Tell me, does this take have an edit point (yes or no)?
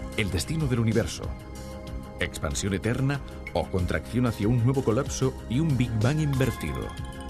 yes